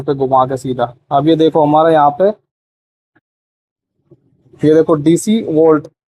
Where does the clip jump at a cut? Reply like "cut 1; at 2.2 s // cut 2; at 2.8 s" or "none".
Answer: none